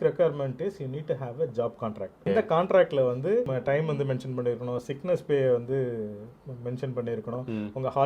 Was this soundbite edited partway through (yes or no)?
yes